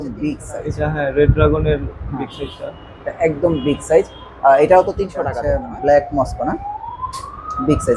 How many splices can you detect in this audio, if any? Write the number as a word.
one